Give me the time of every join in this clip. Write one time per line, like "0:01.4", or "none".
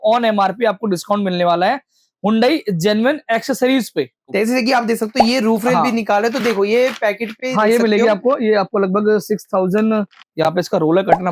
0:04.3
0:10.3